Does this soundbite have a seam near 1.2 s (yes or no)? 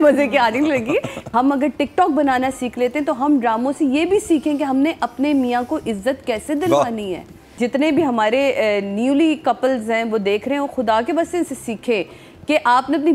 yes